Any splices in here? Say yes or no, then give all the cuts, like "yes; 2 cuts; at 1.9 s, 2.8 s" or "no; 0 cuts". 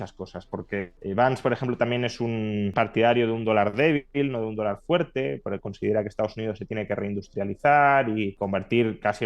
yes; 3 cuts; at 0.9 s, 2.7 s, 8.3 s